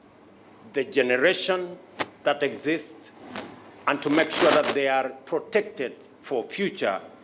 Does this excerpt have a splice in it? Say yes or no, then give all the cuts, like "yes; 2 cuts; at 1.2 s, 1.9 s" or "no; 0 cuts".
no; 0 cuts